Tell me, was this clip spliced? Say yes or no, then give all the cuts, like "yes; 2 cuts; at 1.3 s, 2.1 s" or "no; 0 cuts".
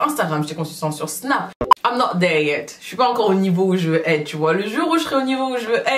yes; 1 cut; at 1.6 s